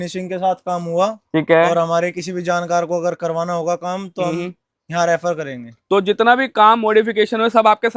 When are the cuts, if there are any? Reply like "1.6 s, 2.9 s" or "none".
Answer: none